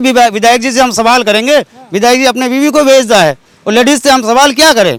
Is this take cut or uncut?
uncut